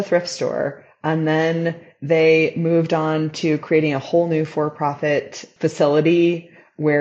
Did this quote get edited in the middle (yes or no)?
yes